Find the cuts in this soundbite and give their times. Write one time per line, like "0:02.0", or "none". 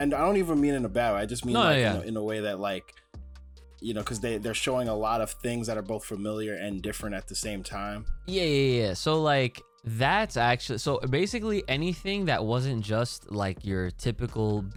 none